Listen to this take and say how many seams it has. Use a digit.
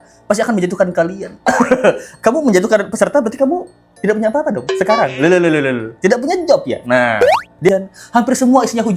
1